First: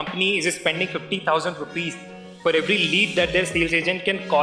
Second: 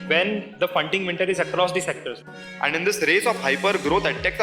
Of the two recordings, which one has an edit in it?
second; 1 cut; at 2.2 s

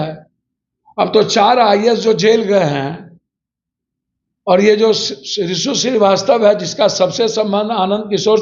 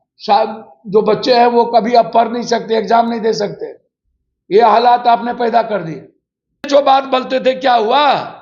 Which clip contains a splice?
second; 1 cut; at 6.7 s

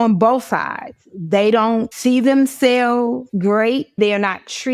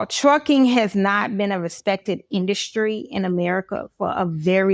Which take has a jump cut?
first; 3 cuts; at 1.9 s, 3.2 s, 3.9 s

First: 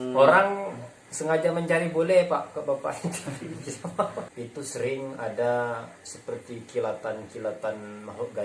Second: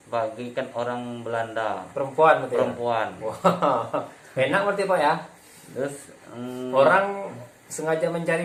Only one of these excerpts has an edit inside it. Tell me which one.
first; 1 cut; at 4.2 s

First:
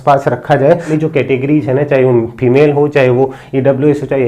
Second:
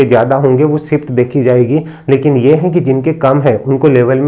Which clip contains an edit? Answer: first; 1 cut; at 0.9 s

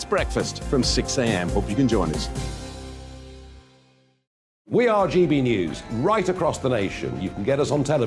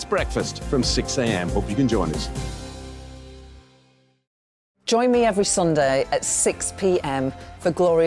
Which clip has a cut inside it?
second; 1 cut; at 4.5 s

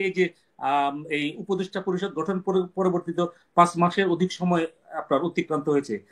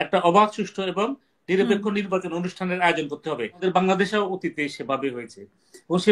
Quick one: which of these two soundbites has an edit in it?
second; 1 cut; at 3.6 s

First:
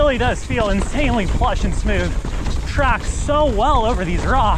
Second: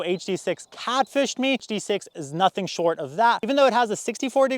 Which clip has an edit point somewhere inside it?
second; 1 cut; at 1.7 s

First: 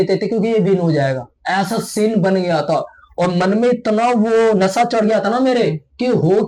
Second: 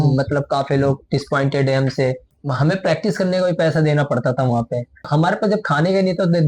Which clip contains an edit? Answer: second; 2 cuts; at 2.3 s, 5.1 s

